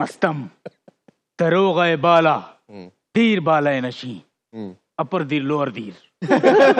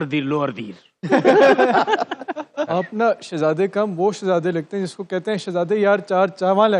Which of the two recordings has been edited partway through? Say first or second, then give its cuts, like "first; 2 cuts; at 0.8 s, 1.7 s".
second; 1 cut; at 2.7 s